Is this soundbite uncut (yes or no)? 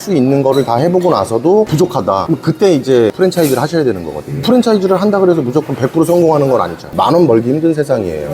no